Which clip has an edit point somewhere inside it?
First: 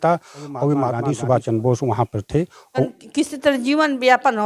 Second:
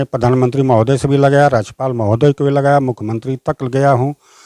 first; 2 cuts; at 1.0 s, 2.9 s

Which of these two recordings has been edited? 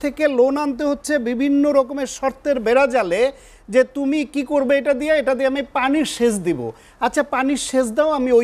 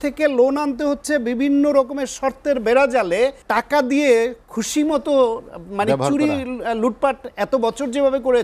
second; 1 cut; at 3.4 s

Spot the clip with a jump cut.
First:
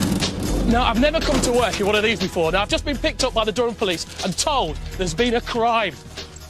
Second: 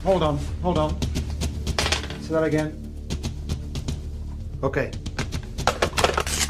first; 1 cut; at 3.4 s

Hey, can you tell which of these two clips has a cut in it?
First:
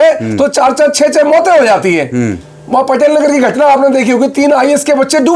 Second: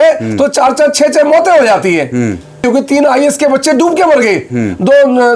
second; 1 cut; at 2.6 s

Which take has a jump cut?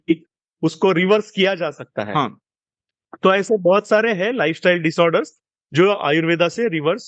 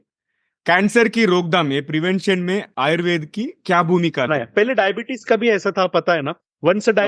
second; 1 cut; at 4.4 s

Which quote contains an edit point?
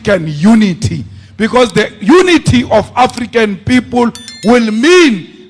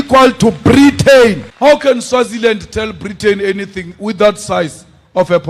second; 1 cut; at 1.5 s

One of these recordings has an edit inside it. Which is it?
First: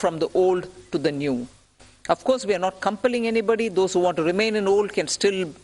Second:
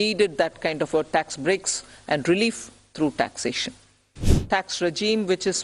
second; 1 cut; at 4.3 s

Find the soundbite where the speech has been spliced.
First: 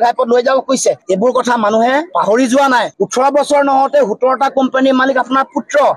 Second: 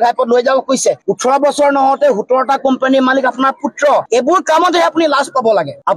second; 2 cuts; at 1.0 s, 4.0 s

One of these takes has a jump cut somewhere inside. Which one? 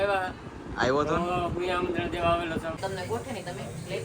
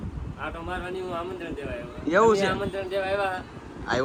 first; 1 cut; at 2.8 s

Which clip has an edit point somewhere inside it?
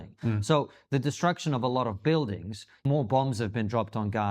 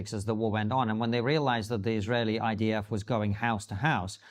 first; 1 cut; at 2.7 s

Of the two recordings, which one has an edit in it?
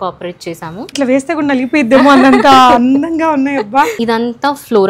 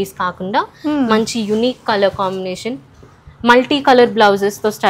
first; 2 cuts; at 0.9 s, 4.0 s

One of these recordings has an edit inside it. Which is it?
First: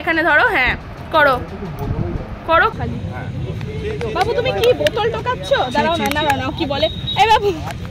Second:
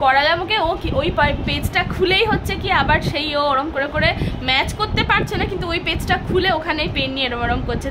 first; 1 cut; at 2.7 s

